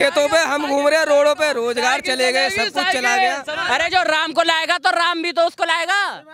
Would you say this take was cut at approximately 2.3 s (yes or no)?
no